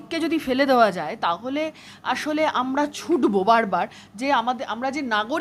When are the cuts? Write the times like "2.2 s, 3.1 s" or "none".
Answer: none